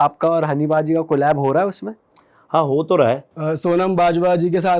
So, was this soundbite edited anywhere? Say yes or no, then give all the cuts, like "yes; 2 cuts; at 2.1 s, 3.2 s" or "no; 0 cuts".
yes; 1 cut; at 3.3 s